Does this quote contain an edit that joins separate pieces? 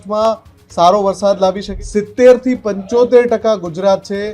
yes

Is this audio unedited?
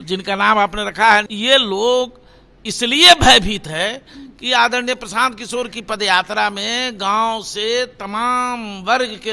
no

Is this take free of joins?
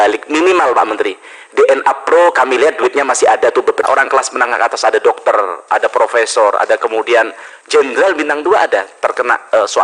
no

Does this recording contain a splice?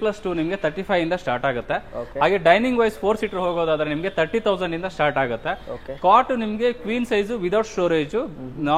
no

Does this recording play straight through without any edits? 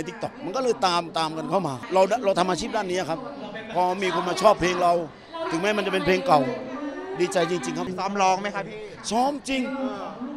no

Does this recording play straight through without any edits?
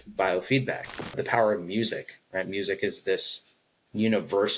no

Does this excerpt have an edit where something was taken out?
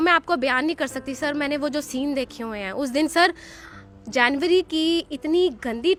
no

